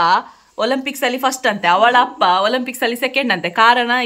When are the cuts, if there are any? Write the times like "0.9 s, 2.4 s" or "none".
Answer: none